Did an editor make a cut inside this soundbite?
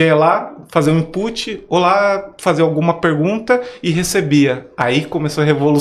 no; 0 cuts

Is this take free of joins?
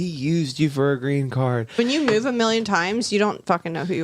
no; 1 cut; at 1.7 s

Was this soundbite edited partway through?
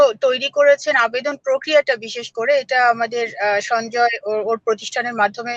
no; 0 cuts

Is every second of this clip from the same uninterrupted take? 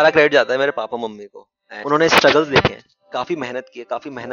no; 1 cut; at 1.7 s

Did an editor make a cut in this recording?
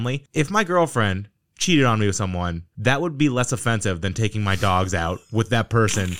no; 0 cuts

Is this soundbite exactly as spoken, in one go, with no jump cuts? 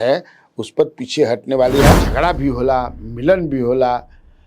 no; 1 cut; at 2.0 s

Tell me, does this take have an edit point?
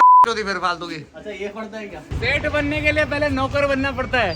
yes; 1 cut; at 2.1 s

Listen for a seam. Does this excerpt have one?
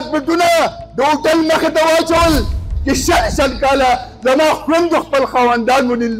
yes; 1 cut; at 2.7 s

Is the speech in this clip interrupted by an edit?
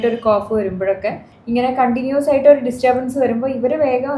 yes; 1 cut; at 1.3 s

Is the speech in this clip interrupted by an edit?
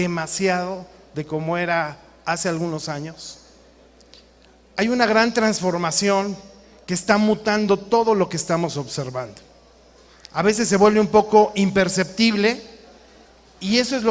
yes; 1 cut; at 6.0 s

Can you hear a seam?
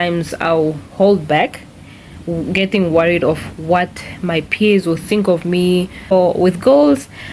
yes; 1 cut; at 6.1 s

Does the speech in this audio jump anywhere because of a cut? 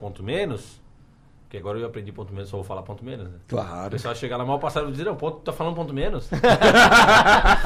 no; 0 cuts

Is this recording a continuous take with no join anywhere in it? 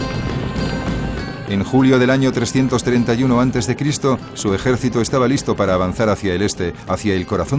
no; 1 cut; at 6.6 s

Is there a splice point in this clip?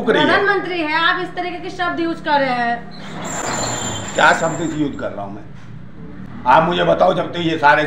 no; 0 cuts

